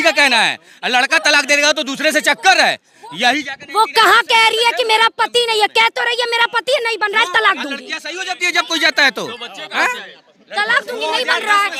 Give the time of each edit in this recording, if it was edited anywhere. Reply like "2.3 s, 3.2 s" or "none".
none